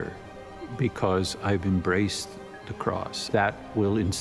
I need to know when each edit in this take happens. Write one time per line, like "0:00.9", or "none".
0:03.1